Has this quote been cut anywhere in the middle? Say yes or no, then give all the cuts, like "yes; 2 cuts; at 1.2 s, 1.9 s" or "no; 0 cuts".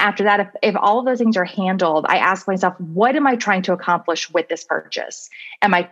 no; 0 cuts